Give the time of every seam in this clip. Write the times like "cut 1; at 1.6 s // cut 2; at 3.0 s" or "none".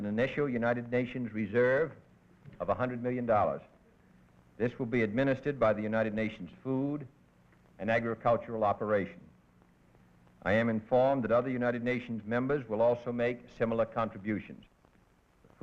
cut 1; at 8.3 s